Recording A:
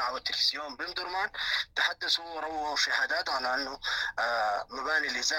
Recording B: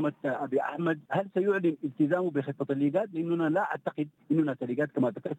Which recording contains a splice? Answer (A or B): B